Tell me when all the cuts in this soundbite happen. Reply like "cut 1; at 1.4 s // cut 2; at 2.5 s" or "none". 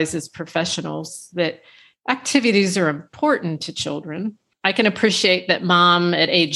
cut 1; at 4.5 s